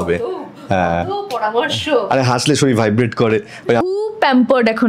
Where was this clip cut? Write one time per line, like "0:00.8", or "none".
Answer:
0:03.9